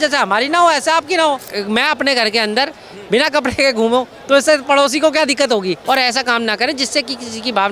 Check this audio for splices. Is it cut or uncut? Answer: cut